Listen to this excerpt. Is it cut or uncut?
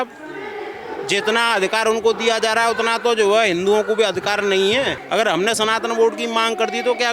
cut